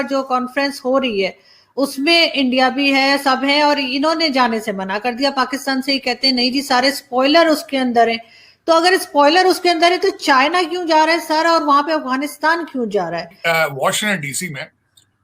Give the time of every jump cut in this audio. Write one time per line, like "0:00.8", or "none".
0:13.3